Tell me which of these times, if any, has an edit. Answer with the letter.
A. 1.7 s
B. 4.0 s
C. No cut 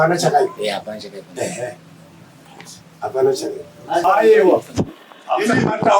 B